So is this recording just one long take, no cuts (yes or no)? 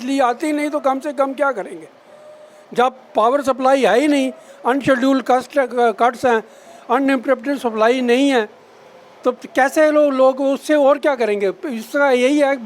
yes